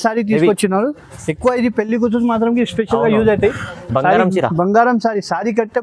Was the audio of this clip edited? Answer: no; 0 cuts

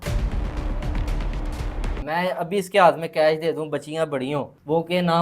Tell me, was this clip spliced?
yes; 1 cut; at 1.9 s

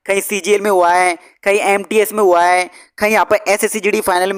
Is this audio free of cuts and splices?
yes; 0 cuts

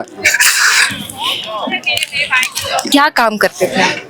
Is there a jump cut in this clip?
yes; 1 cut; at 2.9 s

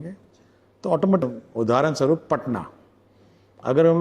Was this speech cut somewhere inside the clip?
yes; 1 cut; at 1.2 s

